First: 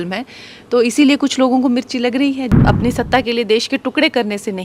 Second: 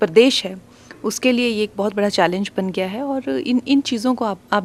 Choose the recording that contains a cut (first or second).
first